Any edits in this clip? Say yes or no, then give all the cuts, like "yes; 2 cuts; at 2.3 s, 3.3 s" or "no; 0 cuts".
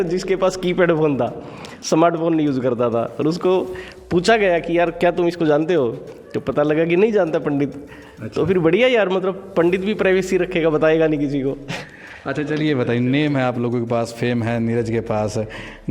no; 0 cuts